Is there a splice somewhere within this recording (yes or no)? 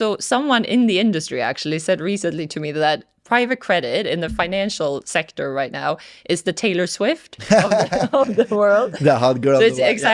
no